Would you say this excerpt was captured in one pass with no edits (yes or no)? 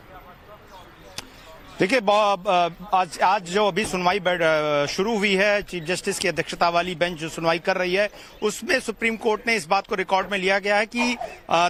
yes